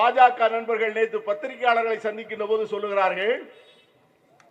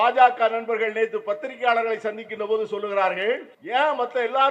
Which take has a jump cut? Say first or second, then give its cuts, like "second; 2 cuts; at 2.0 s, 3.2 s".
second; 1 cut; at 3.5 s